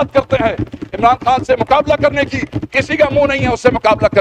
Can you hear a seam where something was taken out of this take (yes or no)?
no